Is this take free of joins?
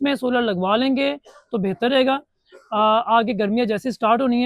yes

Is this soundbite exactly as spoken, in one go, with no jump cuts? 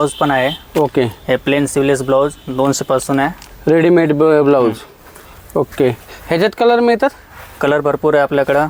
yes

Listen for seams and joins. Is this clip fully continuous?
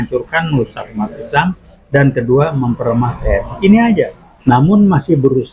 no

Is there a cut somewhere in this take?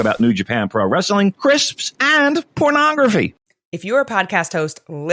yes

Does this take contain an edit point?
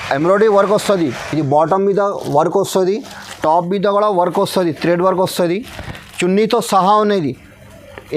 no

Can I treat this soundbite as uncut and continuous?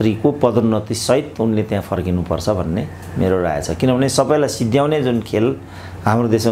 yes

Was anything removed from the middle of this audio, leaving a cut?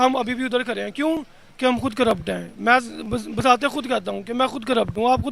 no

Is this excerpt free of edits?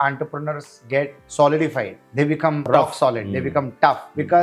no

